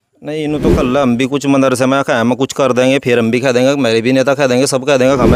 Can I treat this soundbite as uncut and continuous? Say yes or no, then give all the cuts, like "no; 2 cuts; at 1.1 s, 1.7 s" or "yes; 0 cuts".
yes; 0 cuts